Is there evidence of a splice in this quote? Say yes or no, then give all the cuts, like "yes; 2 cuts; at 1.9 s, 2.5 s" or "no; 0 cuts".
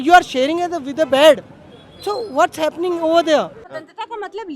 yes; 1 cut; at 3.6 s